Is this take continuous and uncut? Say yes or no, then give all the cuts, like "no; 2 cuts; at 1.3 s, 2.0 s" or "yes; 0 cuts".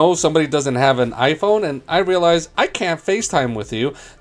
yes; 0 cuts